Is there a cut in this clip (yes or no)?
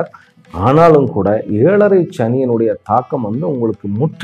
no